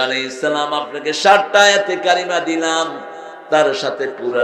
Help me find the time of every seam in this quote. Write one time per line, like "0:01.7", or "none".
none